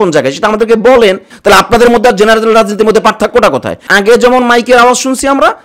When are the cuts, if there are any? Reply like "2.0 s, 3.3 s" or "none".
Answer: 1.3 s, 3.8 s